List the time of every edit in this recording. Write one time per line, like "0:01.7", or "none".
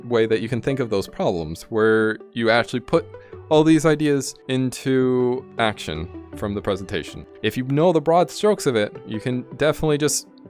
0:01.6
0:04.4
0:05.5
0:07.3

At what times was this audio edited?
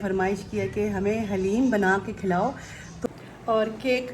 0:02.9

